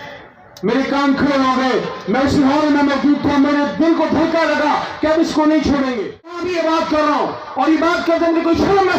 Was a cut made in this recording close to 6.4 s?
yes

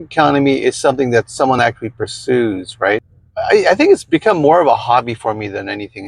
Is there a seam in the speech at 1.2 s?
no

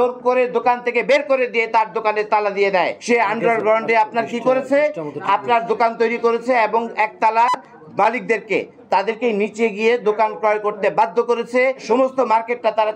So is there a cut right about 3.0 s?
yes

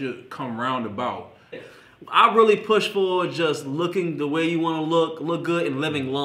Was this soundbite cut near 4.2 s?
no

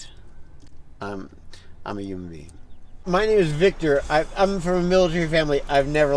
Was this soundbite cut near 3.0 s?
yes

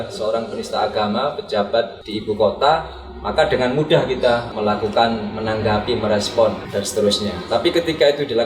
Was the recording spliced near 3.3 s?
no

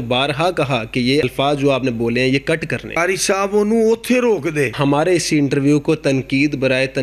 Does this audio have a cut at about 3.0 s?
yes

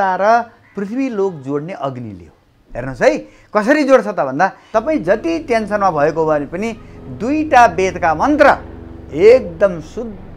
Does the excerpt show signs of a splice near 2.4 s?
no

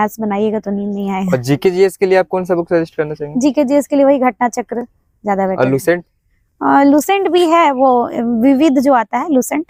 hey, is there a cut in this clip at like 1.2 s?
no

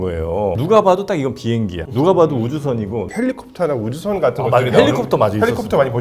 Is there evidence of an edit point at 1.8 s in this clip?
no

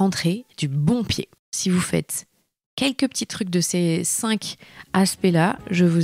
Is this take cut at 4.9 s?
no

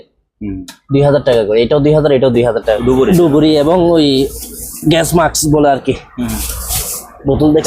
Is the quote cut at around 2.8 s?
yes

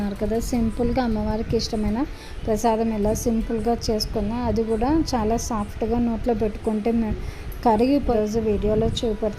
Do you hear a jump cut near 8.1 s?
yes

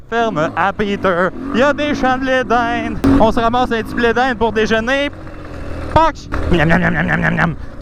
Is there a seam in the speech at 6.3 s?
yes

